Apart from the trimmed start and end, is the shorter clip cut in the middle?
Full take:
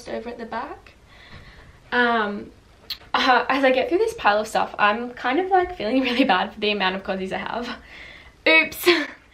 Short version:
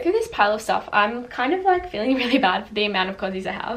no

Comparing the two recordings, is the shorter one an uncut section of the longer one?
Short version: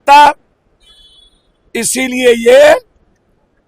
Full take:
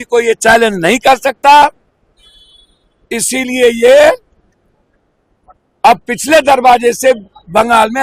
yes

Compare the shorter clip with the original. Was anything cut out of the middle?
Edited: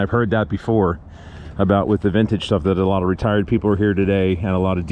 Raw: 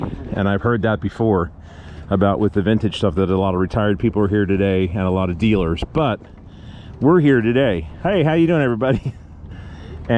no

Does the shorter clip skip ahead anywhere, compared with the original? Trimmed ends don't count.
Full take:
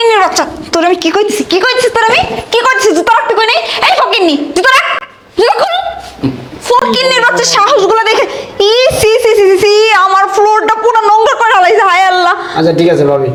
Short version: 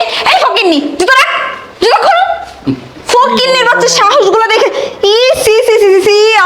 no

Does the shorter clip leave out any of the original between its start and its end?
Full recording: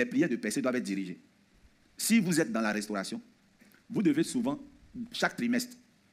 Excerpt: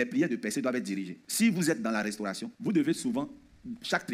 yes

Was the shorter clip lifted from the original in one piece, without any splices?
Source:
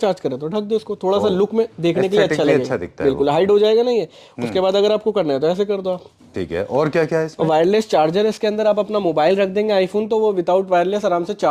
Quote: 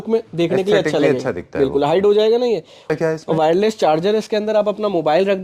no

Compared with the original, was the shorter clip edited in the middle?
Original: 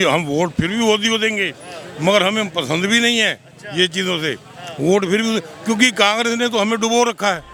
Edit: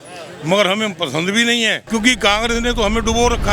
yes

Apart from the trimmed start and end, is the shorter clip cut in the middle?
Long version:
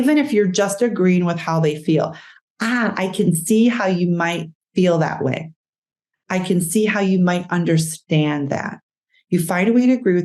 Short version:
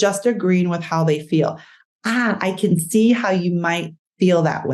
no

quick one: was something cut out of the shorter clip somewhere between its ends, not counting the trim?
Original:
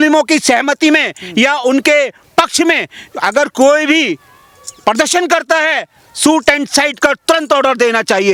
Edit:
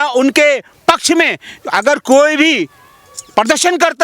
no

